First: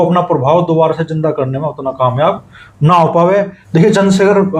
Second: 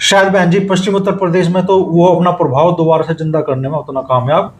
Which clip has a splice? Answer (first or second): first